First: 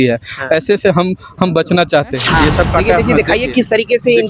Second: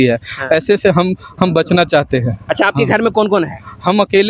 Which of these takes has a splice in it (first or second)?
first